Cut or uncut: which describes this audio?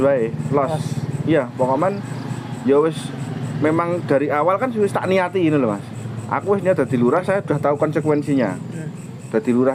uncut